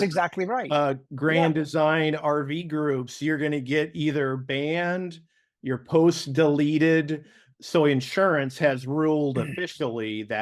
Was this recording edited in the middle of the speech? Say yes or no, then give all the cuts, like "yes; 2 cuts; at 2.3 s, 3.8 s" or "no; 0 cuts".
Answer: yes; 1 cut; at 7.4 s